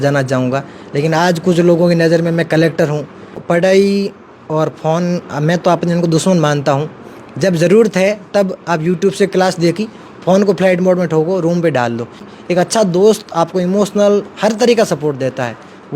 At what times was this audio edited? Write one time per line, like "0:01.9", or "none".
0:03.4
0:12.3